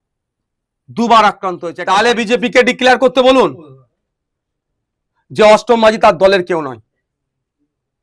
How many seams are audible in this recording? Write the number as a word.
one